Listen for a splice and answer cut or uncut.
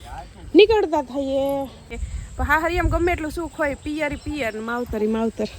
cut